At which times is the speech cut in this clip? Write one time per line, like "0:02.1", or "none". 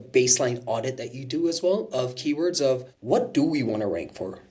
0:02.9